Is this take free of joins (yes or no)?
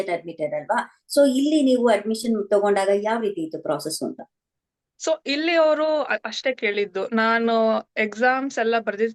yes